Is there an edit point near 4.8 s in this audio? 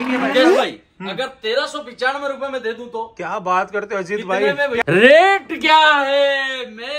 yes; 1 cut; at 4.8 s

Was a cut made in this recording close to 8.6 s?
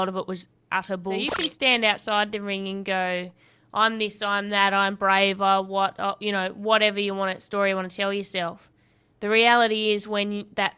no; 1 cut; at 1.3 s

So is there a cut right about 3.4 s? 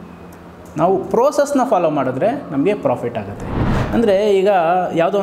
yes; 1 cut; at 3.4 s

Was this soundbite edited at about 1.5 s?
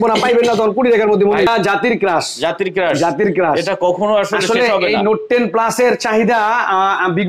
yes; 1 cut; at 1.5 s

